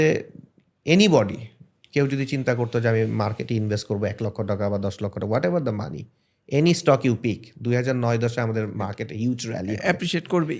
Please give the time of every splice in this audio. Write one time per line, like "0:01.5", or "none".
none